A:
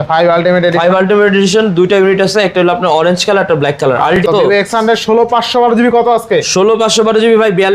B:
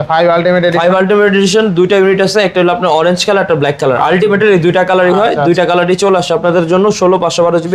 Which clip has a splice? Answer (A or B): A